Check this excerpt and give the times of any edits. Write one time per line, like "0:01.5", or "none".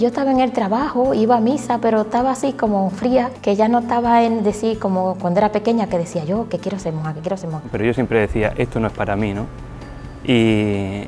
0:03.3
0:07.9